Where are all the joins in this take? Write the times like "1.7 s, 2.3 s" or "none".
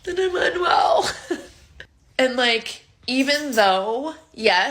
1.5 s